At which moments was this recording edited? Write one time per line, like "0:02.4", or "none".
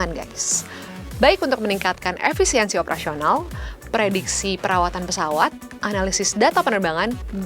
none